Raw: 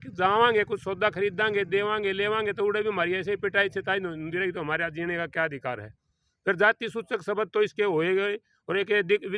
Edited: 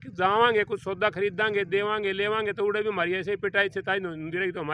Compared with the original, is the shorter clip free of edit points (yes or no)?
yes